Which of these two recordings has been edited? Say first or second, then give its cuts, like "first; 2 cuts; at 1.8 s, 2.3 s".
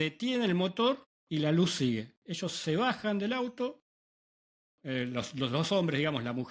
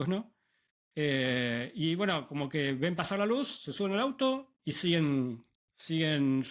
first; 1 cut; at 1.1 s